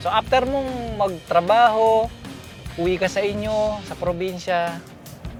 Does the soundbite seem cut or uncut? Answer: uncut